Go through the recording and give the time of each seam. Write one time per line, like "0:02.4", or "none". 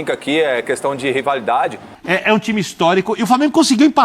0:01.9